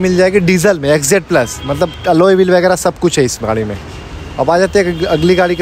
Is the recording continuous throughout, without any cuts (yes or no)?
yes